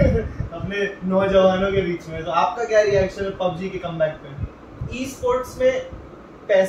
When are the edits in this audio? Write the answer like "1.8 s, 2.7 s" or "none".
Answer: 4.8 s